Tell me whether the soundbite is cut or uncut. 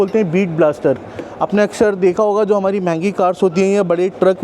uncut